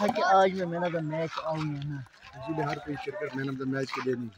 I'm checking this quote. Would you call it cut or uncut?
uncut